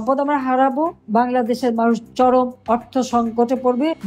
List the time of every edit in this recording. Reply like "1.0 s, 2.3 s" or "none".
1.0 s